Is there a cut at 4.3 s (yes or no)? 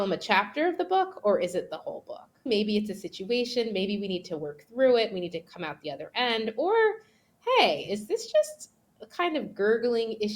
no